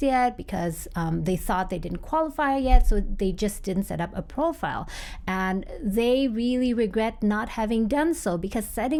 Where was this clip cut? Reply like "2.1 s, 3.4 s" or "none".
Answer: none